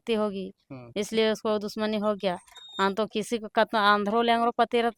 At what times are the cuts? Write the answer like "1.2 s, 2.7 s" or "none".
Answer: none